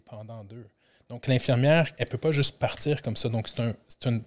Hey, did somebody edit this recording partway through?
yes; 1 cut; at 2.0 s

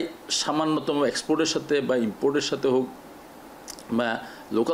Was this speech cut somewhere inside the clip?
no; 0 cuts

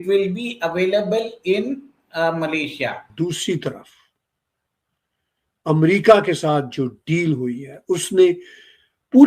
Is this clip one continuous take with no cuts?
no; 1 cut; at 3.1 s

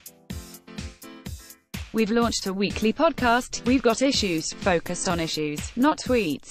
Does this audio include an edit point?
yes; 1 cut; at 1.8 s

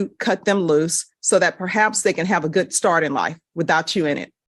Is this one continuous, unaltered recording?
yes; 0 cuts

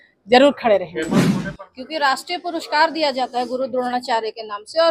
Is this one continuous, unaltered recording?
no; 1 cut; at 1.3 s

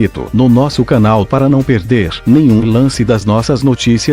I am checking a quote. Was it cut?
yes; 1 cut; at 1.2 s

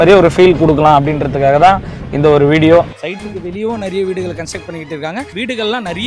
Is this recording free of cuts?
no; 2 cuts; at 3.0 s, 5.3 s

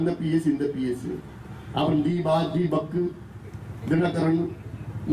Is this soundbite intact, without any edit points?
yes; 0 cuts

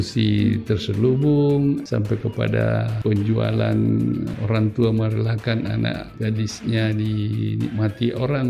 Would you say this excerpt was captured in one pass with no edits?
no; 4 cuts; at 1.8 s, 2.9 s, 4.3 s, 6.1 s

